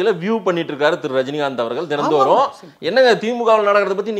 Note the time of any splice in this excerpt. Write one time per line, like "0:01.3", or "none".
none